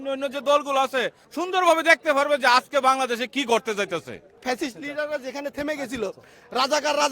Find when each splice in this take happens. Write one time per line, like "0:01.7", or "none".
0:01.2
0:04.4